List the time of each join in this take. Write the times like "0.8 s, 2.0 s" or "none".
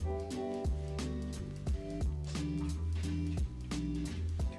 none